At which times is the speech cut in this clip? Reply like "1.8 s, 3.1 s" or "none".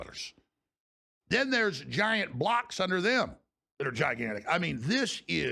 none